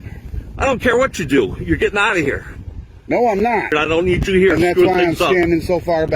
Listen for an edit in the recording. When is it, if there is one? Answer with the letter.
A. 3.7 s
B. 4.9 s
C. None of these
A